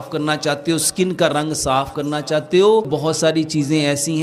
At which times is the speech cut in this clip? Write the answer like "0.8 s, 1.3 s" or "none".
2.9 s